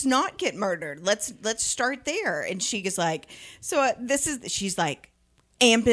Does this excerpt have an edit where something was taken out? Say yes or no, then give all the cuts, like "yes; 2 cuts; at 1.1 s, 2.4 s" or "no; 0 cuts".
no; 0 cuts